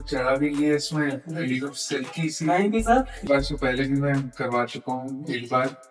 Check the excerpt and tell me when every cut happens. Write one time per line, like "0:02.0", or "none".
0:03.3